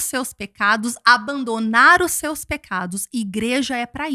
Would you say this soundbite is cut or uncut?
uncut